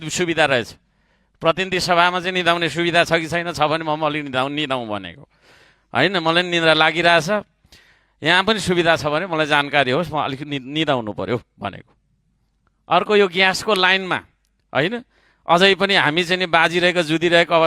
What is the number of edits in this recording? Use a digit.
0